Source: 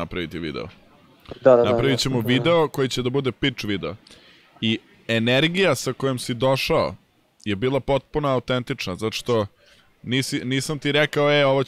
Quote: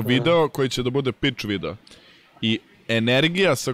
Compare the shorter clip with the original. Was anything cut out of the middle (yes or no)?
no